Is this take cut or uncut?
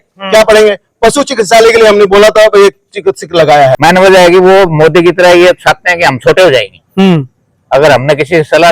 cut